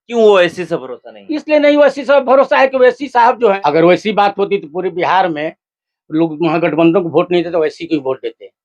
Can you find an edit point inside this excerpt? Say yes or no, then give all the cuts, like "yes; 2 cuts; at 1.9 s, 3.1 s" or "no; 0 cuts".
yes; 1 cut; at 3.6 s